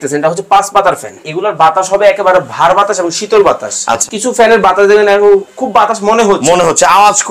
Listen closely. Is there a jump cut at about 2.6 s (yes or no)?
no